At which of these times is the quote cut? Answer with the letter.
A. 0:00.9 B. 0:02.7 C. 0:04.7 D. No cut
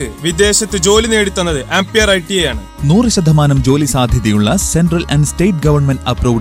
D